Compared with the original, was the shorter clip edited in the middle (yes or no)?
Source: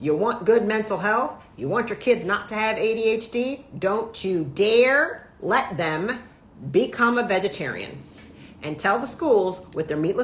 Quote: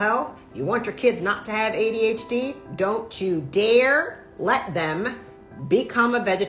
no